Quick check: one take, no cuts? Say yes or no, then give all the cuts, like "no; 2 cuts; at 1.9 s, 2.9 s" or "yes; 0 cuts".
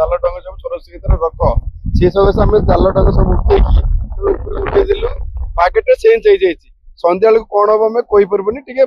yes; 0 cuts